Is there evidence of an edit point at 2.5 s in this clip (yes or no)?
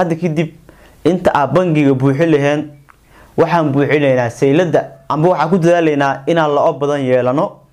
no